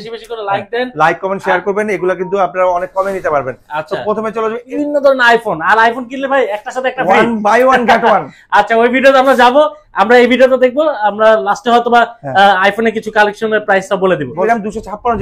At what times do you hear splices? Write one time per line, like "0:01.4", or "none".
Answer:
0:04.6
0:14.4